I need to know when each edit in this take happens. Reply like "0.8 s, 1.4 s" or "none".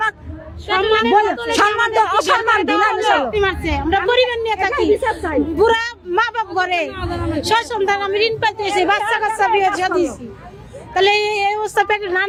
none